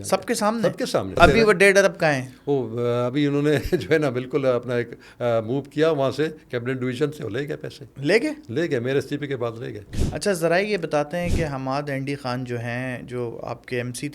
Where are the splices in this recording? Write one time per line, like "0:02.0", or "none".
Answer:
0:01.2
0:09.8